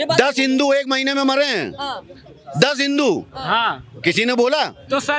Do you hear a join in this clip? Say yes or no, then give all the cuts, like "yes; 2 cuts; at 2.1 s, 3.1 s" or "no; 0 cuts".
no; 0 cuts